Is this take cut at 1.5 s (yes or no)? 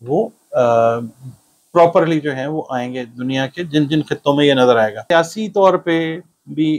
no